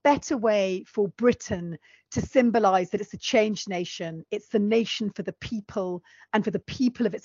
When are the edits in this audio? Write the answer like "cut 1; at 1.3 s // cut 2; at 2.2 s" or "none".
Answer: none